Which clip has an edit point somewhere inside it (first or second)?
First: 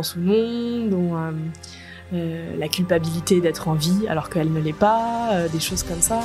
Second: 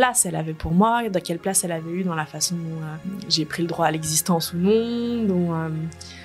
second